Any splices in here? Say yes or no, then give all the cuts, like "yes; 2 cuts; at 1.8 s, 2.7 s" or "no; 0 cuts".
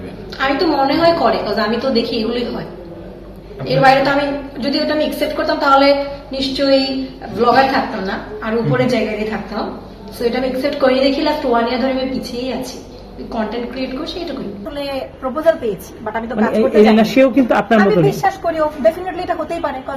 yes; 1 cut; at 14.7 s